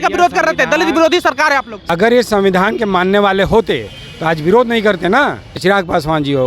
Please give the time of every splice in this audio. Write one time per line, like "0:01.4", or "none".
0:01.8
0:05.6